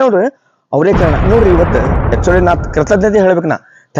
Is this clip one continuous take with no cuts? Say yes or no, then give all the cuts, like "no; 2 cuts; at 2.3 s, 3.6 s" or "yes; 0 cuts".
no; 1 cut; at 2.1 s